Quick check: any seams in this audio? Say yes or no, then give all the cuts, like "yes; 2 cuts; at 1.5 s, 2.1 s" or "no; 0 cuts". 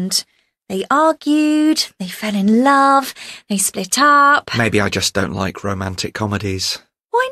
no; 0 cuts